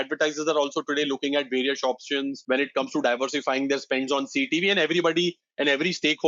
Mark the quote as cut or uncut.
cut